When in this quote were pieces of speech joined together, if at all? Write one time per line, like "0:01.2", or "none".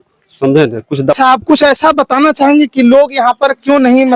0:01.1